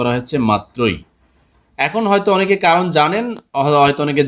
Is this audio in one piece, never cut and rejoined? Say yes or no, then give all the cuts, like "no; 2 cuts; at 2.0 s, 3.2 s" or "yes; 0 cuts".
yes; 0 cuts